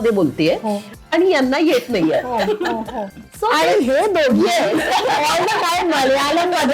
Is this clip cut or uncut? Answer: cut